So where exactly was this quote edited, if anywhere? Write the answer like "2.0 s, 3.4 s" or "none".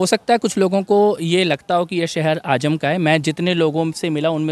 none